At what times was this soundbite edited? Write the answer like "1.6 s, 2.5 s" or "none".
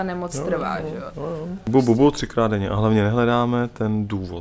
1.6 s